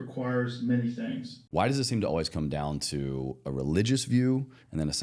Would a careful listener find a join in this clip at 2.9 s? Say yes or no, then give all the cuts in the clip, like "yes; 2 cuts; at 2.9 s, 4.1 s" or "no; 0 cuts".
no; 1 cut; at 1.3 s